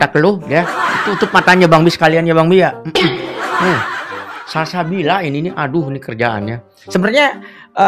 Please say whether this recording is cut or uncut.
uncut